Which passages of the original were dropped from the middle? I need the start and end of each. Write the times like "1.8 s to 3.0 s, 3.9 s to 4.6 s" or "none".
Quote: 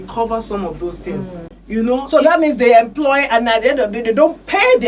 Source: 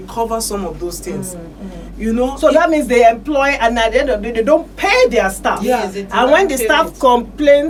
1.5 s to 1.8 s